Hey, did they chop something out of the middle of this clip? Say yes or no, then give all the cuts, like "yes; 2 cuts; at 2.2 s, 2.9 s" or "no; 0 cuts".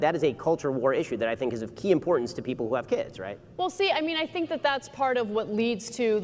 yes; 1 cut; at 3.5 s